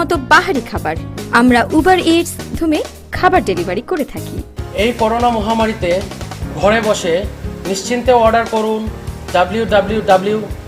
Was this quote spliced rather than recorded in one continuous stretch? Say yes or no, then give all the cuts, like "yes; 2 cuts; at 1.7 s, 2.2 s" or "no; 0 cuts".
yes; 1 cut; at 2.5 s